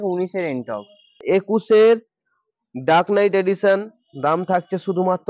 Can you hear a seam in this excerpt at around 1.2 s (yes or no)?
yes